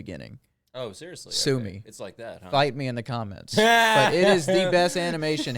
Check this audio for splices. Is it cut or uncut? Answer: uncut